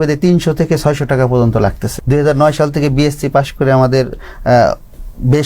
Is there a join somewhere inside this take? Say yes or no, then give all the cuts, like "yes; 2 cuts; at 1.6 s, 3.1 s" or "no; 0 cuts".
yes; 1 cut; at 1.9 s